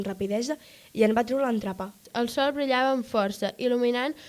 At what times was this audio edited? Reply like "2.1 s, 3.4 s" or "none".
1.9 s